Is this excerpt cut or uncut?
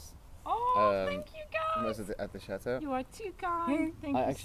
uncut